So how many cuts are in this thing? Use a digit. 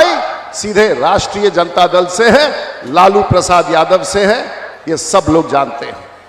0